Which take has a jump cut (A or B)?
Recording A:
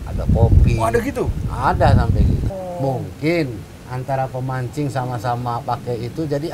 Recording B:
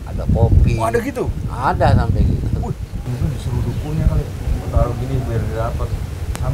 A